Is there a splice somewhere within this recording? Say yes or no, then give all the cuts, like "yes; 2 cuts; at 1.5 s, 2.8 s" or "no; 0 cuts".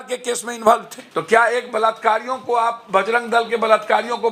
yes; 1 cut; at 1.0 s